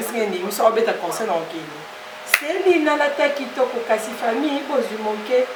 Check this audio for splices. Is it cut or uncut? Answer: uncut